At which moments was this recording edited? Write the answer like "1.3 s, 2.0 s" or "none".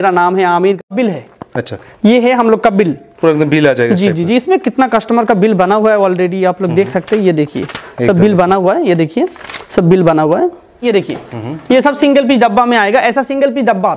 0.8 s, 10.8 s